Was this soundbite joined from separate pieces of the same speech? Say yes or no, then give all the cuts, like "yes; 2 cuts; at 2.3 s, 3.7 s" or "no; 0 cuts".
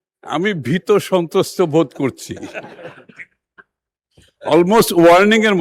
no; 0 cuts